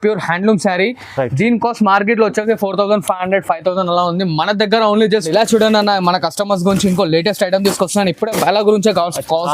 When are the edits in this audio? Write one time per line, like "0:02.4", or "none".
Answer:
0:05.3